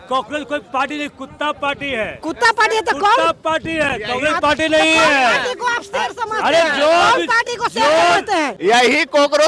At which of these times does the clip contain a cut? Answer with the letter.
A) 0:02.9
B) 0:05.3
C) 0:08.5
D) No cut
C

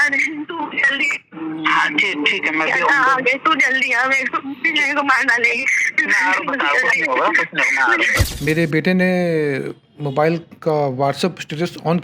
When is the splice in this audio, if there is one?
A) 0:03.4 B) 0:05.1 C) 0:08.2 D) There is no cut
C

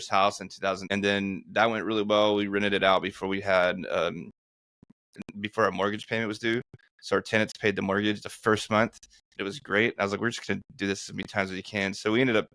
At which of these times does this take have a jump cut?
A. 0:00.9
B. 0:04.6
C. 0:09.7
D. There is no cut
A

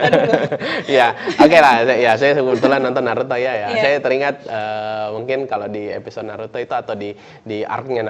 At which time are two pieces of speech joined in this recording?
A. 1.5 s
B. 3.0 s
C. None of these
C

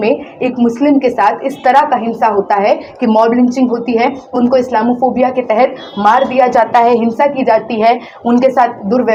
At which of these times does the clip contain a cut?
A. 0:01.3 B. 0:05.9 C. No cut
C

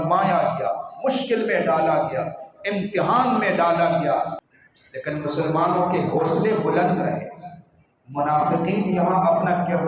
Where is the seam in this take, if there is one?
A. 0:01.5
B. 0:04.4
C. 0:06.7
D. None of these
B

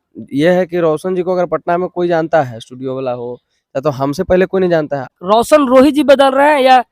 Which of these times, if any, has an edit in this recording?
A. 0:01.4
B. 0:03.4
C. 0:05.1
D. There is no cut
C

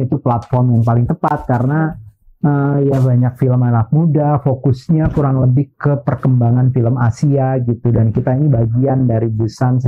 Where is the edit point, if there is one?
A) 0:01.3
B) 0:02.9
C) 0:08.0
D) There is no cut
D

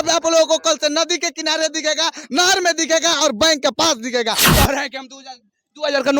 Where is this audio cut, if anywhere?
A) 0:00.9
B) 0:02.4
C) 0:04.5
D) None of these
C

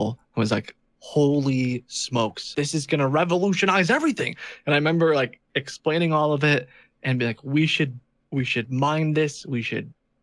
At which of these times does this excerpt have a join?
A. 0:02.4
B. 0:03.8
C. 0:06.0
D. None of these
A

